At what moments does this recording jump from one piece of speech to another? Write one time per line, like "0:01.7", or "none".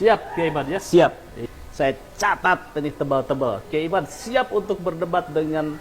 0:01.4